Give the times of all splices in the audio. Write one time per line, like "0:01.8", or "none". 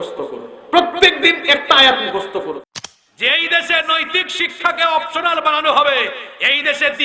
0:02.7